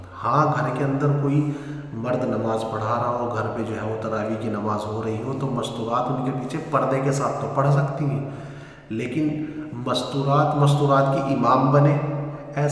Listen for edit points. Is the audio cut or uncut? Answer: uncut